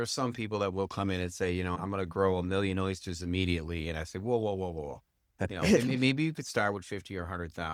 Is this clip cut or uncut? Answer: uncut